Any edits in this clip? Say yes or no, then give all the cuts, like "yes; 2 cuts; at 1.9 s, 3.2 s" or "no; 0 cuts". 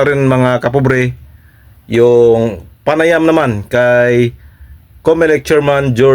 no; 0 cuts